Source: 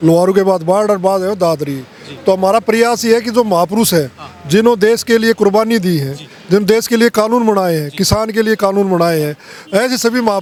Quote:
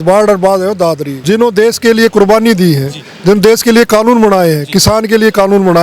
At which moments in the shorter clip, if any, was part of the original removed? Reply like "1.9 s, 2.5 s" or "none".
1.1 s